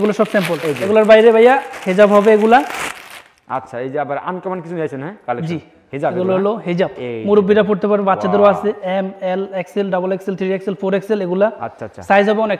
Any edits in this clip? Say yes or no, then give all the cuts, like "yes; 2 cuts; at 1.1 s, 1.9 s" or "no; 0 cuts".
no; 0 cuts